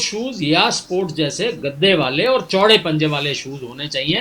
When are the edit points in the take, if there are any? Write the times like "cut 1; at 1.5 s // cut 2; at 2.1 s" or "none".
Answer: none